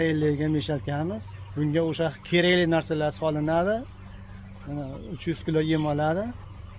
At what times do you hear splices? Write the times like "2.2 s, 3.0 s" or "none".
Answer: none